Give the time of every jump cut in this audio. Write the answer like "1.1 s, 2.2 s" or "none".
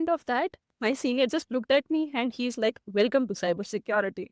none